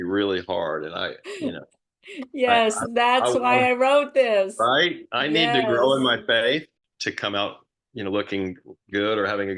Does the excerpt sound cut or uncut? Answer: uncut